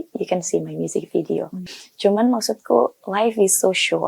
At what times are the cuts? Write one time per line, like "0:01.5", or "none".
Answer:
0:01.6